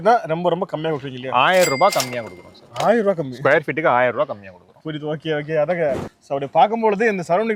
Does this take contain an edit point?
no; 0 cuts

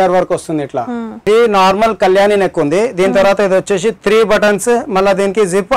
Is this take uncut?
no; 1 cut; at 1.3 s

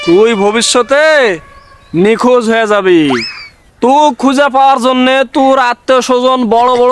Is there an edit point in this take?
no; 0 cuts

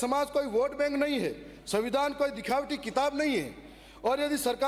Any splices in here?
no; 0 cuts

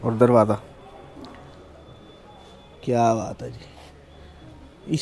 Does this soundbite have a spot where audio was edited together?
no; 0 cuts

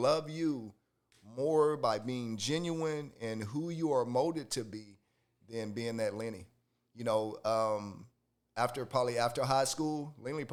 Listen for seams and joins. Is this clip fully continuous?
yes; 0 cuts

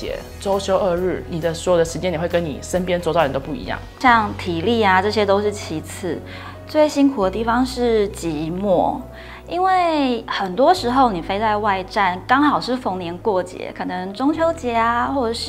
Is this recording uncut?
yes; 0 cuts

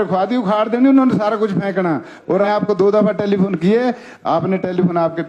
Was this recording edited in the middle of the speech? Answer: yes; 1 cut; at 2.5 s

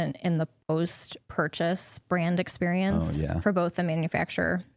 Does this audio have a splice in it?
no; 0 cuts

